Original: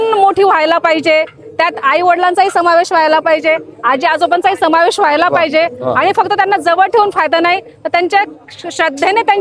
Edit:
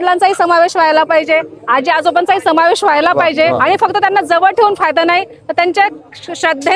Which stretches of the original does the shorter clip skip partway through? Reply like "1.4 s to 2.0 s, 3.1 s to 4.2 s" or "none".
5.7 s to 5.9 s